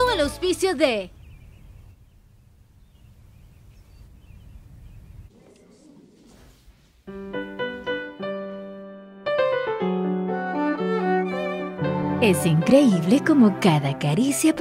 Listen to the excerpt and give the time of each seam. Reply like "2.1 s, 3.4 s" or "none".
1.2 s